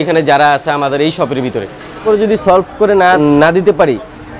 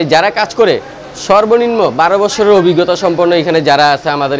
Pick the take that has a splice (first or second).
first